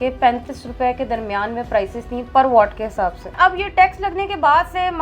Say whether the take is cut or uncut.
cut